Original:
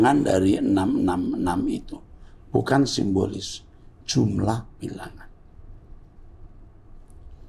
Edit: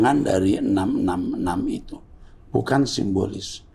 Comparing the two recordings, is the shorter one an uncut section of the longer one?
yes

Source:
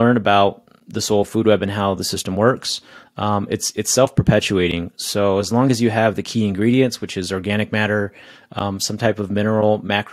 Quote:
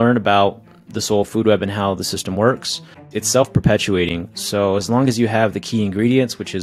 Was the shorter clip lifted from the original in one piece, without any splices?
no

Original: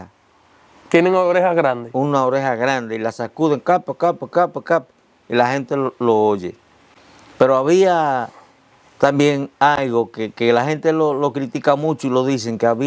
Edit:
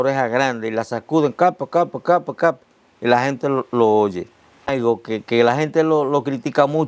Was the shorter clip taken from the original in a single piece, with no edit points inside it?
no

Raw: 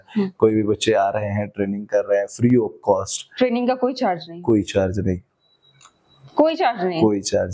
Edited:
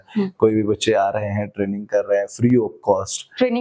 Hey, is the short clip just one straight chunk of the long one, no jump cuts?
yes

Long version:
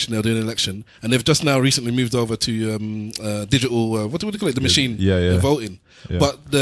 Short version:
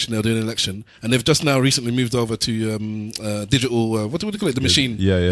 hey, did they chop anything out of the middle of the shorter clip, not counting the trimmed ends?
no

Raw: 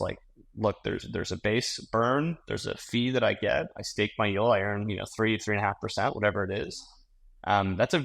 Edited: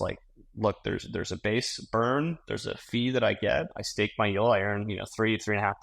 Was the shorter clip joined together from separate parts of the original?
no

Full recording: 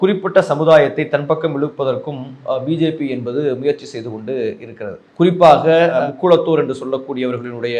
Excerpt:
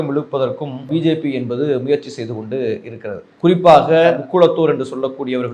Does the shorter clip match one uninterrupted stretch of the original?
no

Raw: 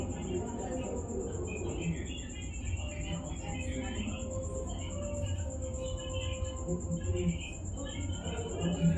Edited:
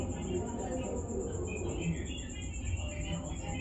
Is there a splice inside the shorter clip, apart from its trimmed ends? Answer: no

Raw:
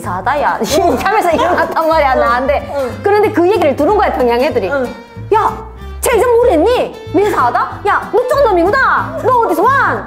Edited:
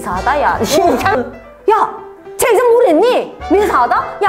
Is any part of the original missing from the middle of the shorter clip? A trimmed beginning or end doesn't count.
yes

